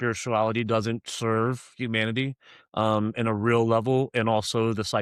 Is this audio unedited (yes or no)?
yes